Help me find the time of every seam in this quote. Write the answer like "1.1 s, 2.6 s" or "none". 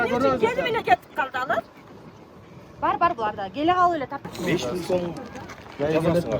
4.2 s